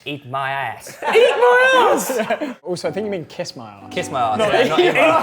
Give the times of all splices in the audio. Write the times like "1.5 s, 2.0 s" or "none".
0.9 s, 2.5 s

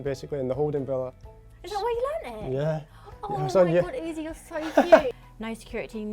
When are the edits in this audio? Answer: 5.2 s

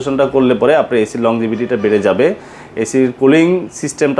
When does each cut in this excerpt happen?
none

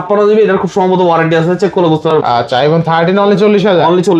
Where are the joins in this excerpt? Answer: 2.1 s

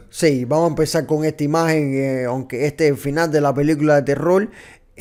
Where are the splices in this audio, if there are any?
none

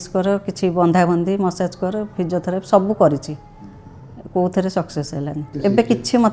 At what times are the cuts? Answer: 5.4 s

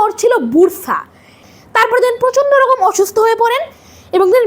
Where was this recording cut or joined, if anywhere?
1.4 s

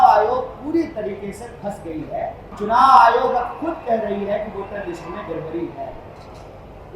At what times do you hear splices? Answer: 2.4 s

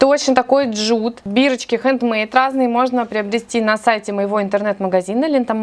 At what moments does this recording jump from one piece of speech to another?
none

